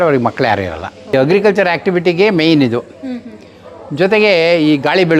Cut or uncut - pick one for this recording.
cut